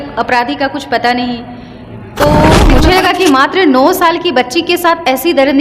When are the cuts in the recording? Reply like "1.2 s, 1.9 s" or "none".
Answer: 2.8 s

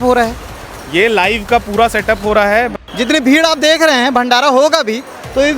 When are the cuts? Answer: 2.7 s

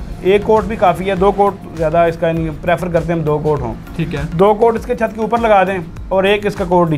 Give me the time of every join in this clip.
none

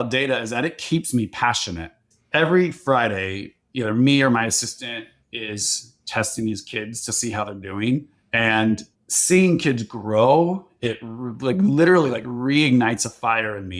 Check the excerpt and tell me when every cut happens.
none

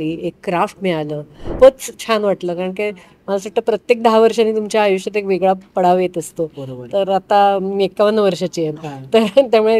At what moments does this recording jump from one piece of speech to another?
1.4 s

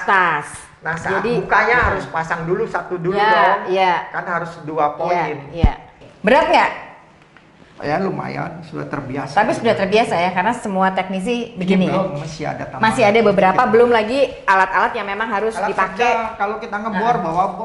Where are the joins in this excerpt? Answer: 6.1 s

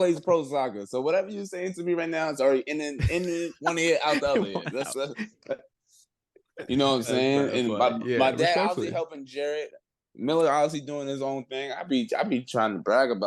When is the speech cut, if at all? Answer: none

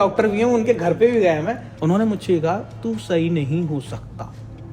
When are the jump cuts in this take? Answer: 1.6 s

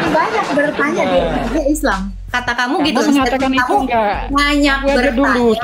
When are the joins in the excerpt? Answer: none

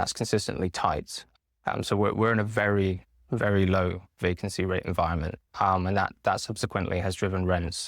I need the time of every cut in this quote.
1.2 s

